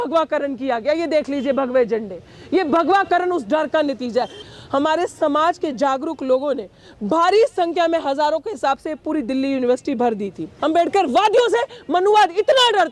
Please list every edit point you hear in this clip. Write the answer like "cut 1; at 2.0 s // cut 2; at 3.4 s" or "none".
cut 1; at 4.4 s // cut 2; at 10.5 s

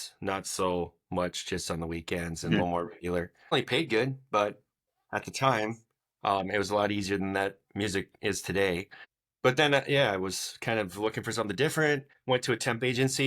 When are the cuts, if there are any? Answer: cut 1; at 3.5 s // cut 2; at 8.9 s // cut 3; at 12.1 s

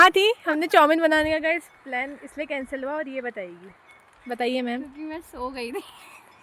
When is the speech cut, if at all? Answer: none

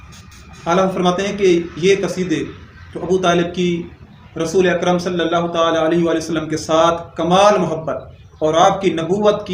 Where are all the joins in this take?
none

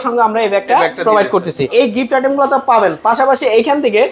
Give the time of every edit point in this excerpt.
cut 1; at 1.7 s

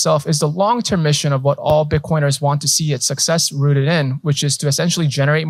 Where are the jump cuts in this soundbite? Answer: none

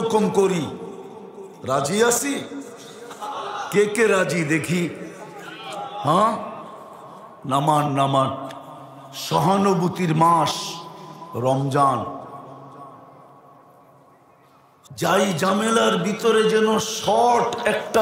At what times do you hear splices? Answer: cut 1; at 14.8 s

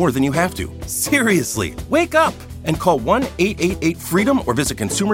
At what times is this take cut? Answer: none

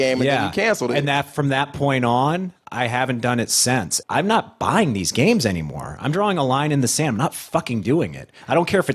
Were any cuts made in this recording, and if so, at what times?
cut 1; at 3.9 s

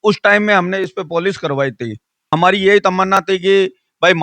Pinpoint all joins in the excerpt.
cut 1; at 2.3 s

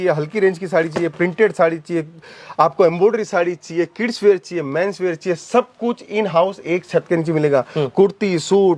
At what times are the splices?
none

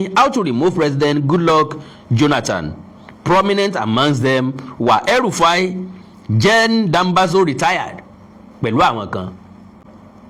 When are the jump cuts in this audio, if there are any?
none

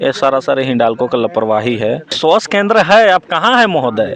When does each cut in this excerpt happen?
cut 1; at 2.1 s

